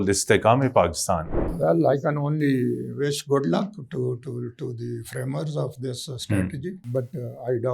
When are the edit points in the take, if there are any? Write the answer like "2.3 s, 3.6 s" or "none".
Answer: 1.6 s, 6.8 s

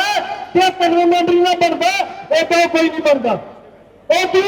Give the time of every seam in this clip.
none

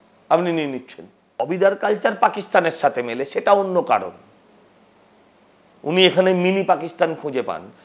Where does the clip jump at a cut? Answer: 1.4 s

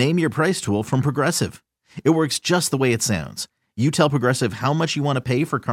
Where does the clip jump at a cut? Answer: none

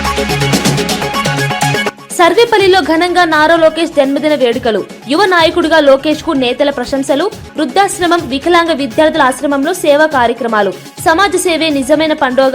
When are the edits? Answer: 2.0 s

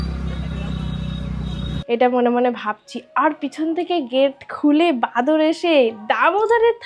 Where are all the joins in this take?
1.8 s

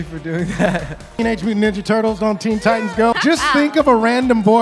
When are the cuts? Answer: 1.2 s, 3.1 s

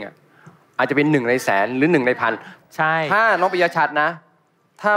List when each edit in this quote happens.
2.6 s

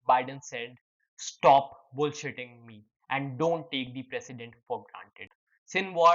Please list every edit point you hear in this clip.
5.1 s

